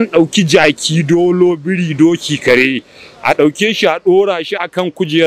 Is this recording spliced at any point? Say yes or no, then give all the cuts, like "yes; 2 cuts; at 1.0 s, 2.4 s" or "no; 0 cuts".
no; 0 cuts